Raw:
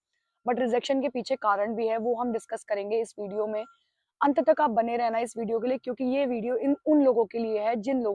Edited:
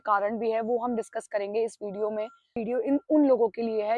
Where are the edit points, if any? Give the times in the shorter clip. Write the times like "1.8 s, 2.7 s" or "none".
2.6 s